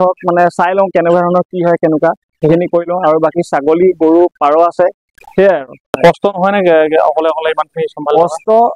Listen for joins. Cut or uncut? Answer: uncut